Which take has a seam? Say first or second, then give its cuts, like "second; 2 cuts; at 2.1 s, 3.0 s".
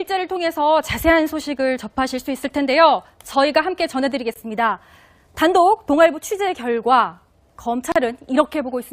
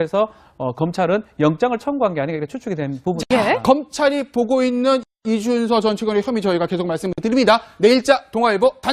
first; 1 cut; at 6.7 s